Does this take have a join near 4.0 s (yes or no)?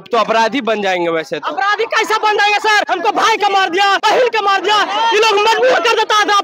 yes